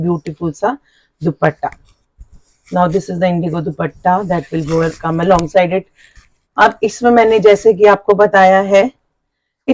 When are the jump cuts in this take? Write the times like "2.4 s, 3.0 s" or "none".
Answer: none